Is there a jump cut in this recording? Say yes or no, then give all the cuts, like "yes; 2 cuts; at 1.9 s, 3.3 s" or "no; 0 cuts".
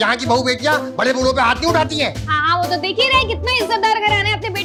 no; 0 cuts